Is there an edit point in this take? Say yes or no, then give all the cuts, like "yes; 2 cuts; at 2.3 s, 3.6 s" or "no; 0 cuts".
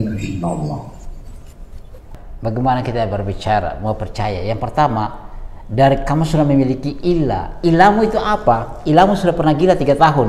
yes; 1 cut; at 2.2 s